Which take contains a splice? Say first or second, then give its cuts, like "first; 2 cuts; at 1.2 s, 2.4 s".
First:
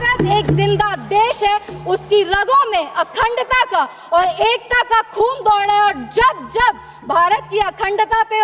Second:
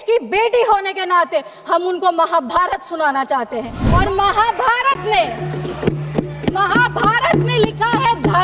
second; 1 cut; at 3.8 s